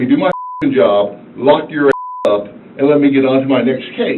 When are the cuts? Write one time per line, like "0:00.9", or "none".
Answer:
none